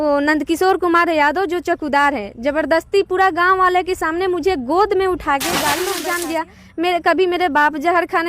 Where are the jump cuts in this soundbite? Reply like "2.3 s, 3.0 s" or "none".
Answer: 5.9 s